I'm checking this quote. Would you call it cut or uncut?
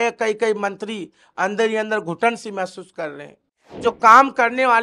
cut